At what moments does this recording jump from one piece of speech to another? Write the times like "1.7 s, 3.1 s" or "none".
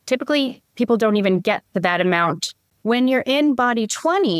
2.6 s